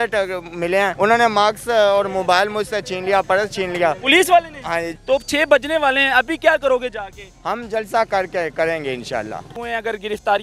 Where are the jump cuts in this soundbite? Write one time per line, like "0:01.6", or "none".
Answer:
0:00.9
0:04.9
0:09.6